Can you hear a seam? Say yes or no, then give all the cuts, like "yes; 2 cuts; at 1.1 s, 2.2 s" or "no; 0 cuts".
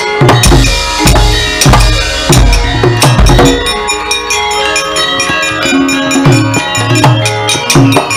no; 0 cuts